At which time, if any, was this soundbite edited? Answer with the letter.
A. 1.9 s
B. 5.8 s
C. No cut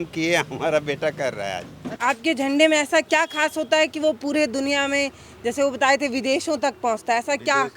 A